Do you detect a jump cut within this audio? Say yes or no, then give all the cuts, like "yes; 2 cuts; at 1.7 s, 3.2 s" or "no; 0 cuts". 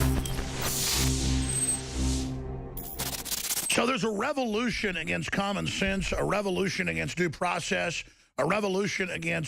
yes; 1 cut; at 7.6 s